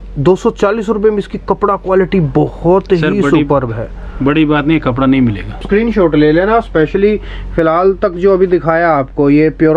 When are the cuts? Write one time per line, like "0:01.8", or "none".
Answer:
0:05.6